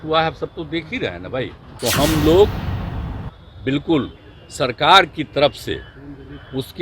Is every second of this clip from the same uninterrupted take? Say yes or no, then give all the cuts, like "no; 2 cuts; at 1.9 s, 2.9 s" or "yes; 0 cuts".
no; 1 cut; at 1.6 s